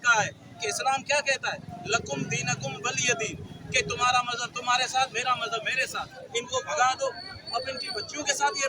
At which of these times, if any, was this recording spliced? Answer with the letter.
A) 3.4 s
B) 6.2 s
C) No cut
B